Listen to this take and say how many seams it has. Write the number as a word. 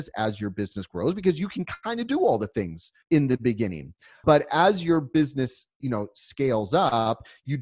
one